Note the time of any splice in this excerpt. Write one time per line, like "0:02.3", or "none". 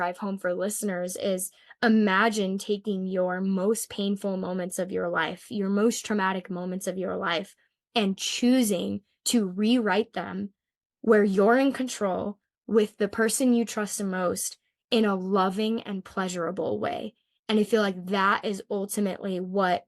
none